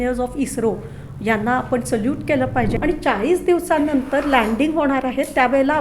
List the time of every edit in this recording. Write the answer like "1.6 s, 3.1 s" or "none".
2.7 s